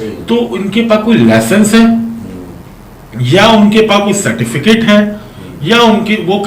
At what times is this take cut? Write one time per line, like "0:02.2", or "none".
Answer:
none